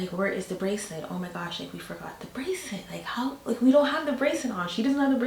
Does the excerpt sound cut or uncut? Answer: uncut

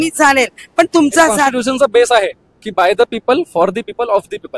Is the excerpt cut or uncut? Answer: cut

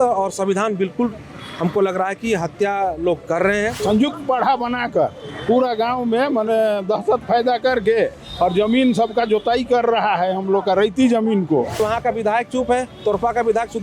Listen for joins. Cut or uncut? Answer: cut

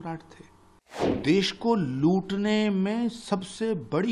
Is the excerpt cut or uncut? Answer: cut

